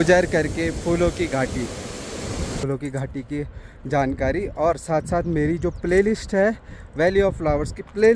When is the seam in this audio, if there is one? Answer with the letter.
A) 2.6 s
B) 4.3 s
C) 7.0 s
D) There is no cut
A